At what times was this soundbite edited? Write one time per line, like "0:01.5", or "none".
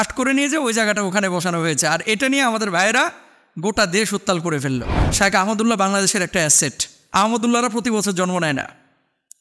0:05.0